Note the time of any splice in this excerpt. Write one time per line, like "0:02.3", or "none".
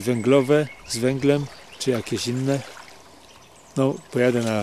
0:03.4

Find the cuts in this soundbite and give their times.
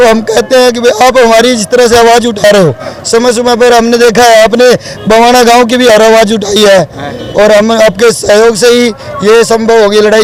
none

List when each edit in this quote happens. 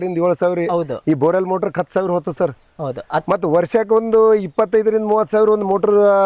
none

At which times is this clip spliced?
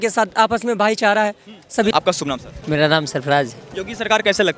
0:01.9
0:03.6

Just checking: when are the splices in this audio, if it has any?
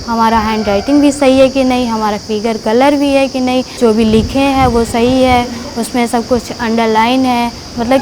0:03.7

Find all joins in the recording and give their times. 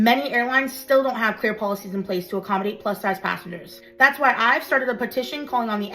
0:04.5

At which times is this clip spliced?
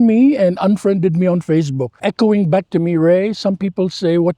0:01.9

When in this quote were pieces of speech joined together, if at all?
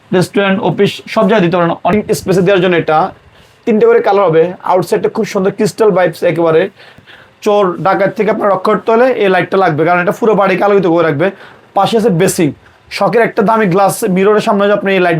0:01.9
0:07.0

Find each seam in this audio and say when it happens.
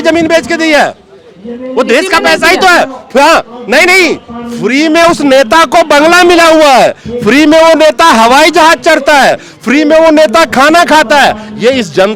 none

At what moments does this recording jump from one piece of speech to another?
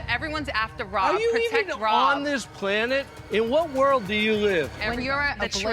0:04.8

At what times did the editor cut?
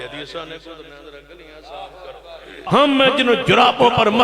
0:02.6

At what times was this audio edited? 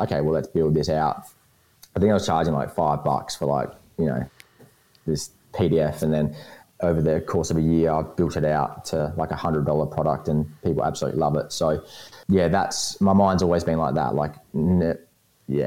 0:06.6
0:12.1

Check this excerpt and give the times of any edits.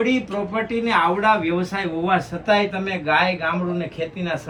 none

